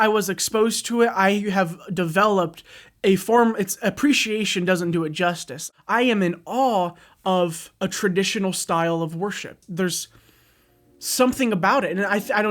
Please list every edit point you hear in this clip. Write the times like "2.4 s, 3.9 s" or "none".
5.6 s